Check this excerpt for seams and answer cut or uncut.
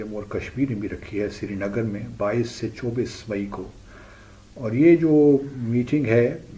uncut